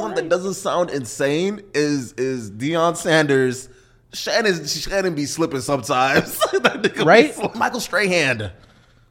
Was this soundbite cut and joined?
yes; 1 cut; at 7.5 s

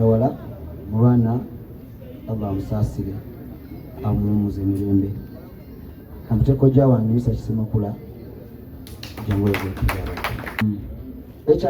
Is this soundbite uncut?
no; 1 cut; at 10.6 s

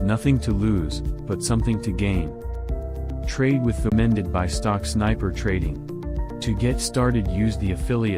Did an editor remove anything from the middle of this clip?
yes; 1 cut; at 3.9 s

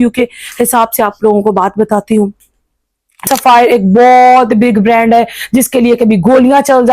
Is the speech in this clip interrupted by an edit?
yes; 1 cut; at 3.2 s

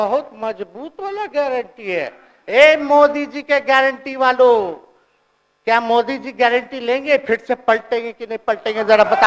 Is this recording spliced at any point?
no; 0 cuts

